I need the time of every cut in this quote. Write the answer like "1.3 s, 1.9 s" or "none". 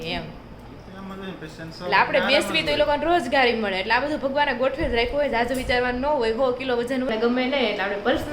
7.1 s